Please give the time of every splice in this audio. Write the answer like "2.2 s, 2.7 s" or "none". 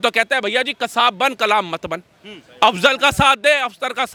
none